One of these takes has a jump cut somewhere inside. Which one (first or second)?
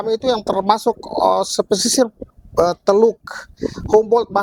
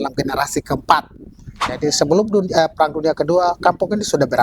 second